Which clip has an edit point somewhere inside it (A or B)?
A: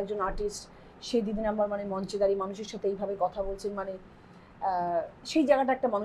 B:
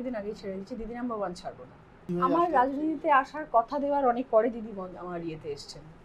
B